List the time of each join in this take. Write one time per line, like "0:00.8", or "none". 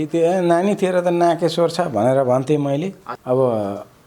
0:03.1